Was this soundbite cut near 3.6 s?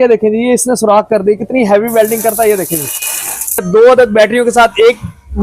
yes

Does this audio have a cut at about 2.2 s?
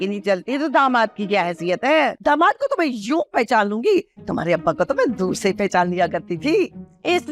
no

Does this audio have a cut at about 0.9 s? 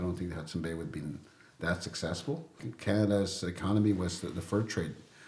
no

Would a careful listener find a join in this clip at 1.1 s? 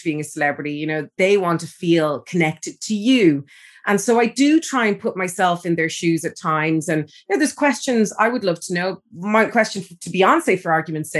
yes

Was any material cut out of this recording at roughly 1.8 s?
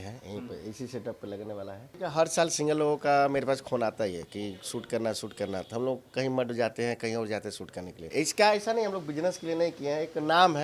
yes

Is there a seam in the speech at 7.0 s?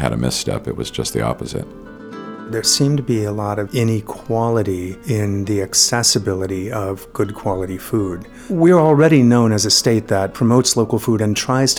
no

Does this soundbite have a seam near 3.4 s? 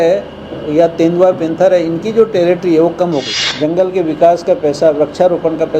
yes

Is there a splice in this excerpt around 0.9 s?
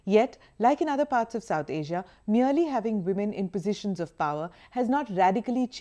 yes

